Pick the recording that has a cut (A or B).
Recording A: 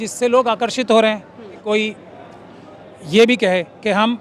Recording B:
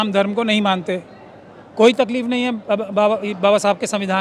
A